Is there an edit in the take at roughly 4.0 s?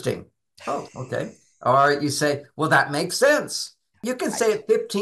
yes; 1 cut; at 4.0 s

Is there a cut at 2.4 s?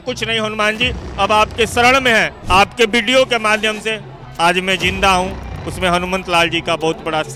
yes; 1 cut; at 2.4 s

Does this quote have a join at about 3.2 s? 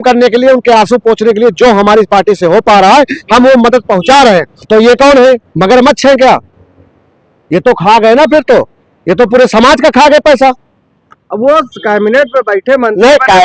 no; 1 cut; at 4.5 s

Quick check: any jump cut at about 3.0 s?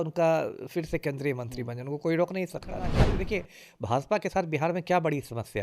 yes; 1 cut; at 3.0 s

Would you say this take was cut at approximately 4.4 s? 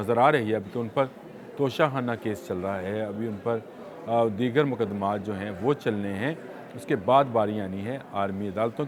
no; 0 cuts

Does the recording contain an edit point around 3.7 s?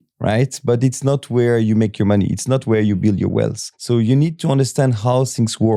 yes; 1 cut; at 3.7 s

